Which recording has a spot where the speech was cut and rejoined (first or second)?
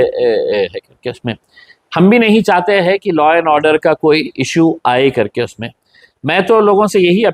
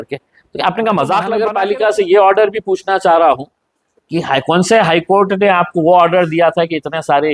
second